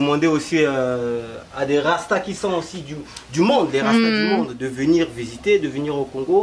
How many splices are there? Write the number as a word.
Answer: zero